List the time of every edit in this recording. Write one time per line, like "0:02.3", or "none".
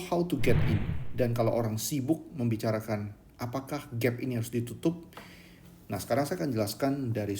0:01.0